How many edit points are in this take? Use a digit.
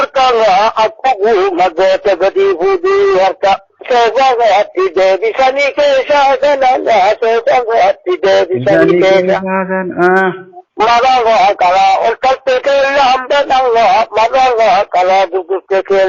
1